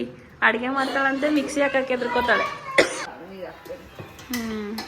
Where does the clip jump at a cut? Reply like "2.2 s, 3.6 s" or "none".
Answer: 3.1 s